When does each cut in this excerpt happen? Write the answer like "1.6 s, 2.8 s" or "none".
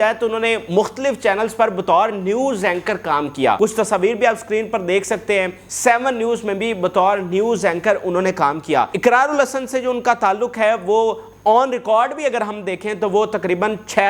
3.6 s, 5.6 s, 8.9 s